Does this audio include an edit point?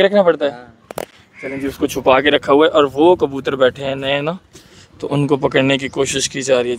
no; 0 cuts

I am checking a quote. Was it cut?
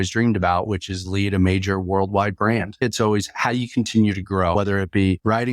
yes; 2 cuts; at 2.8 s, 4.5 s

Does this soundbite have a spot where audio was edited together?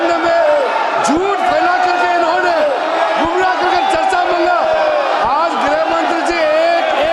no; 0 cuts

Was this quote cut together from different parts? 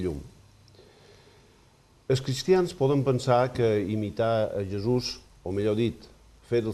yes; 1 cut; at 5.2 s

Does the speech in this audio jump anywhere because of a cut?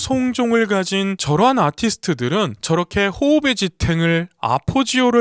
yes; 1 cut; at 2.6 s

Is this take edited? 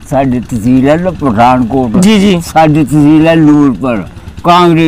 no; 0 cuts

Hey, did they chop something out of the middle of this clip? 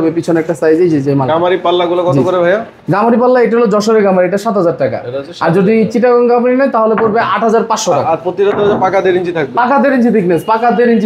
no; 0 cuts

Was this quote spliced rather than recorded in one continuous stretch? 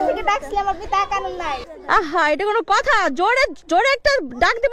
yes; 1 cut; at 1.7 s

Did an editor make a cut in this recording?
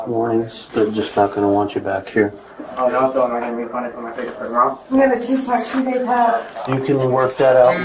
no; 0 cuts

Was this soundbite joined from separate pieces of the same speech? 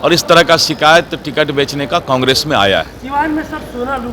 no; 0 cuts

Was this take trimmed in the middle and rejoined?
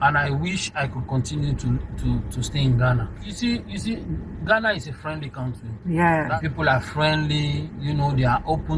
yes; 2 cuts; at 3.3 s, 6.3 s

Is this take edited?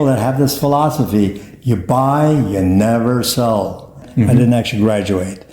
yes; 1 cut; at 4.1 s

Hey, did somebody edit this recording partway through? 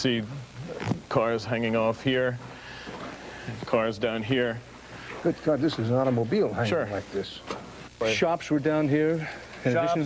yes; 1 cut; at 7.9 s

